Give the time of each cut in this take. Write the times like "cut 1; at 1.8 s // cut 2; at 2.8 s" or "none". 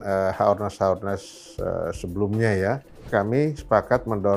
cut 1; at 3.1 s